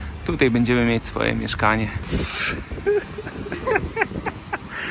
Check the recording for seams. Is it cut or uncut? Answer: cut